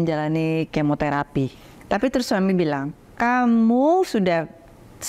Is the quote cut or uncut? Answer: cut